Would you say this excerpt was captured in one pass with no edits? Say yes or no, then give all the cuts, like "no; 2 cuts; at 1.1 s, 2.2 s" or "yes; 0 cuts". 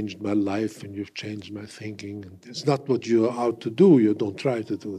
no; 1 cut; at 2.4 s